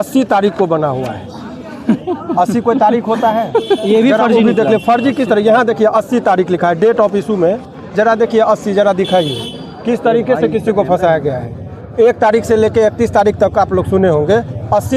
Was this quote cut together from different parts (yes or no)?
no